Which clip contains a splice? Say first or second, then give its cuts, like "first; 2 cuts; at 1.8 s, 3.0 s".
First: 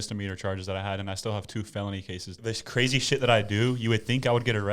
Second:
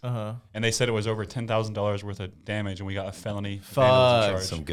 first; 1 cut; at 2.4 s